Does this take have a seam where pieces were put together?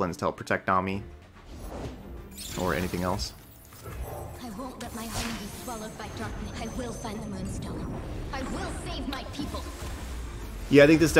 yes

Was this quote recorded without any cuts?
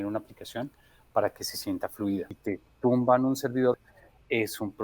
no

